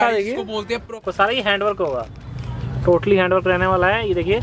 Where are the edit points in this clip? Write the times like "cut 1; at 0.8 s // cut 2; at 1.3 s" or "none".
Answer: cut 1; at 1.0 s